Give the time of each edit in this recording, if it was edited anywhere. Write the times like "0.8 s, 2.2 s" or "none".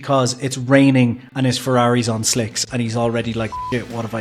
none